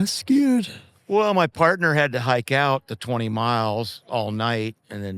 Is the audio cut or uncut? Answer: uncut